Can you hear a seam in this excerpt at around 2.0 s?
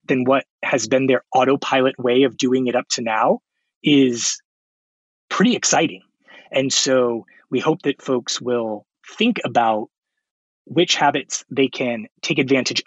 no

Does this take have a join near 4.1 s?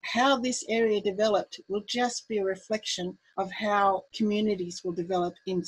yes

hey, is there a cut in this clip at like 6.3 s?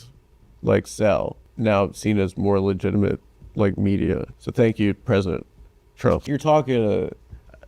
yes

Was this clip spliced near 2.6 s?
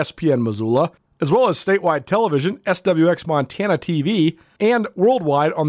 no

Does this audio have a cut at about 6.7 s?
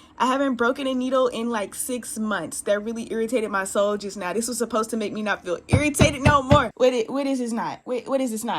yes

